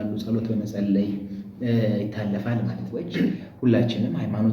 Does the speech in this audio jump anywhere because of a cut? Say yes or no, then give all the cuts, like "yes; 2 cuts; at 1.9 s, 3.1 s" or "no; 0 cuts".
yes; 1 cut; at 3.4 s